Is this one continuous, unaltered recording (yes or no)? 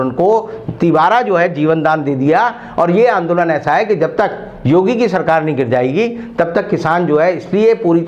yes